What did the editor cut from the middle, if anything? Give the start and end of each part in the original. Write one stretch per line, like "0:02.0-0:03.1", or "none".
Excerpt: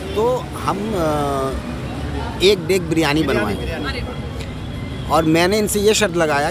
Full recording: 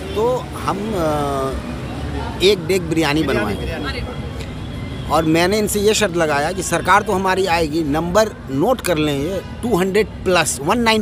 none